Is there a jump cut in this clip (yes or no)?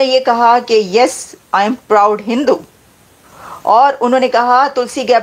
no